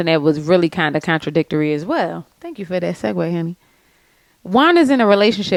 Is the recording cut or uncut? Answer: uncut